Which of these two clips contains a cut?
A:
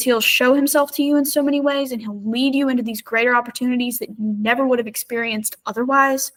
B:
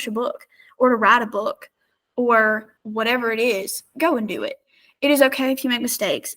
B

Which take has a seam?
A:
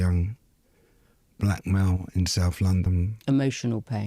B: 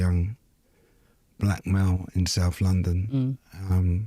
A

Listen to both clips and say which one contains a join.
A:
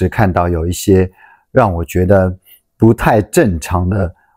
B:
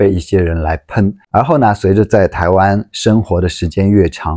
B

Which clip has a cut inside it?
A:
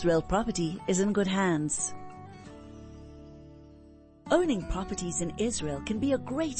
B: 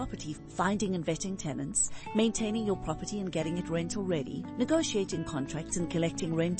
A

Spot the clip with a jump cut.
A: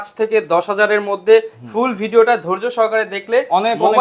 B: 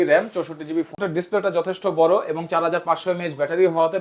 B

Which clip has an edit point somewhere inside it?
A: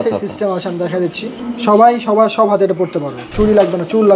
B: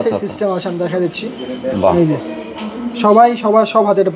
A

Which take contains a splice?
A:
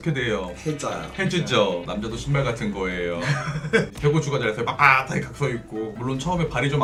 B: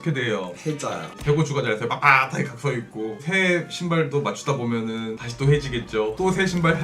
B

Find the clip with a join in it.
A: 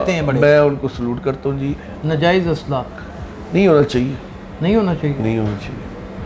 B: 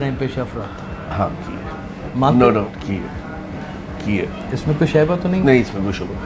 A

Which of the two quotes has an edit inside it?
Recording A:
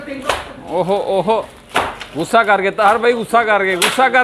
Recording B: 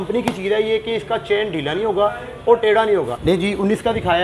B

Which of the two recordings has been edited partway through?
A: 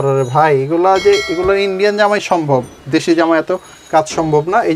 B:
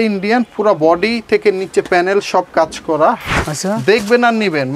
B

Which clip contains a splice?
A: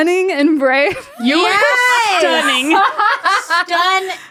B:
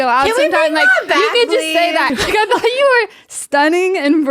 B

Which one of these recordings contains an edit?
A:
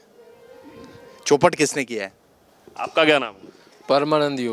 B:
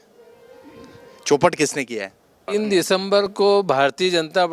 B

